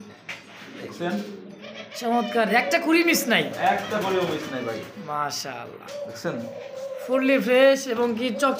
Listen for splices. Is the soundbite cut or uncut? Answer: uncut